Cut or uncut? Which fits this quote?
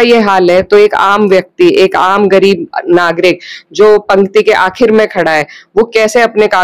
uncut